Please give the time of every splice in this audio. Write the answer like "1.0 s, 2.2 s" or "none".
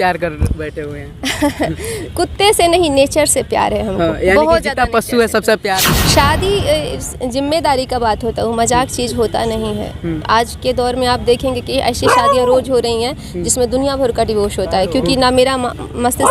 5.9 s